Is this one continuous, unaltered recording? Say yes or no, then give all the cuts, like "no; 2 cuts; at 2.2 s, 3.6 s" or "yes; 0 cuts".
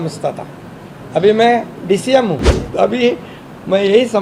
no; 1 cut; at 2.6 s